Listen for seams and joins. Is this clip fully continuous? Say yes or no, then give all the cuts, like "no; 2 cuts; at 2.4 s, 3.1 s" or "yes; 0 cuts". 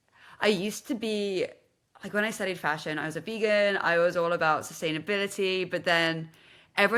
yes; 0 cuts